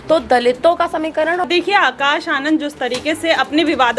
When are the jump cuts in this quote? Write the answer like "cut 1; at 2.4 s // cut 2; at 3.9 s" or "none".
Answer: cut 1; at 1.5 s